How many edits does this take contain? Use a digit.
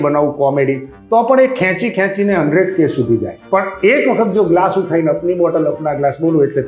1